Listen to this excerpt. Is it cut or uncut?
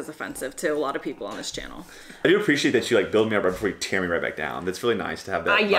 cut